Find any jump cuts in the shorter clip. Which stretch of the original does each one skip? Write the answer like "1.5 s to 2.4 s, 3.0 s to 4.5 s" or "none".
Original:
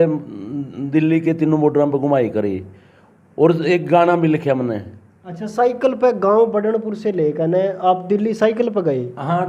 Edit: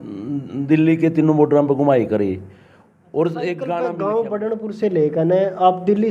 4.1 s to 6.1 s